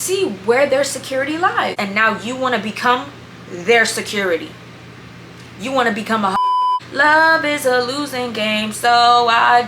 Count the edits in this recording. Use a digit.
2